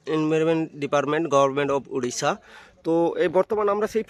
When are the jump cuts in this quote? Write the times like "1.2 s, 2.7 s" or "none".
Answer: none